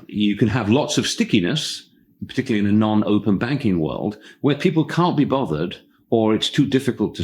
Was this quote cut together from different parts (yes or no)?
no